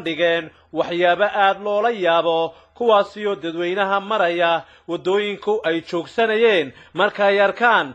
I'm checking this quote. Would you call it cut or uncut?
uncut